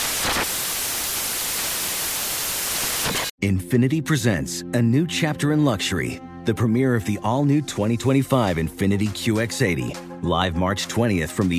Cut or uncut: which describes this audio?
cut